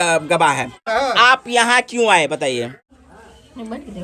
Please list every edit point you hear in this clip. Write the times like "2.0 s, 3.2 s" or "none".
0.8 s, 2.8 s